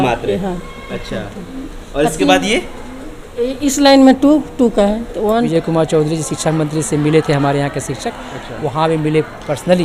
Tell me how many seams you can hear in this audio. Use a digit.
1